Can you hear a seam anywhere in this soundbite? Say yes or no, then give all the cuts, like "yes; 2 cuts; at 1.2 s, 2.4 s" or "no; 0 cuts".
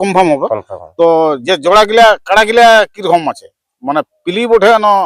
yes; 1 cut; at 1.4 s